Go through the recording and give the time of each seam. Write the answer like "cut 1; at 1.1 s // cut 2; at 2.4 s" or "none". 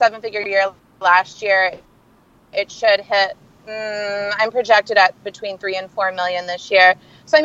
none